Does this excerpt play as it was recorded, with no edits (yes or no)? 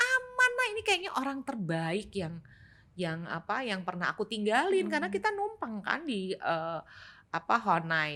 yes